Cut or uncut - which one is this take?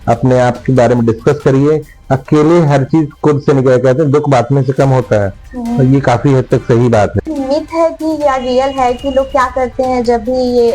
cut